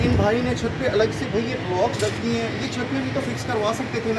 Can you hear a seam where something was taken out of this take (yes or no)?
no